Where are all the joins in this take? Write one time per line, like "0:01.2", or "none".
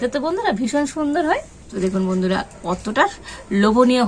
0:01.6